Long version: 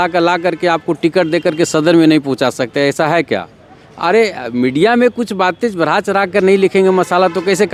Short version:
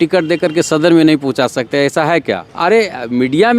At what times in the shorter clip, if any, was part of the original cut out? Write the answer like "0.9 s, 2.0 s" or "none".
2.5 s